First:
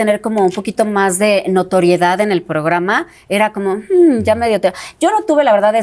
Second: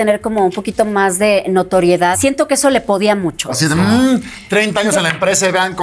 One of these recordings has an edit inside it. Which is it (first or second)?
second